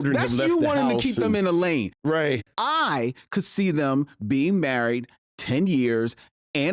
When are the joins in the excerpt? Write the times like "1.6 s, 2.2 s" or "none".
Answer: 2.3 s